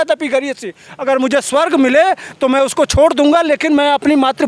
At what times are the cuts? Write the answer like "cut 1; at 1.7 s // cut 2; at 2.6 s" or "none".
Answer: none